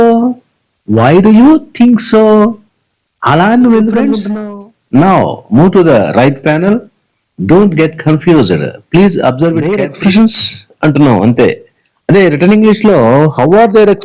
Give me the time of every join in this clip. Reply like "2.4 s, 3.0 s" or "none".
4.3 s, 9.7 s